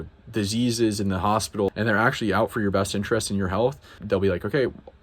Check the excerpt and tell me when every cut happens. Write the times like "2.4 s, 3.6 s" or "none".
1.7 s, 4.0 s